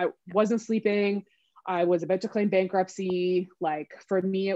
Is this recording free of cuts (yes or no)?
yes